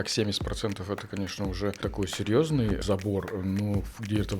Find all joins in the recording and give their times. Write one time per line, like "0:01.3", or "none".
0:01.8
0:02.8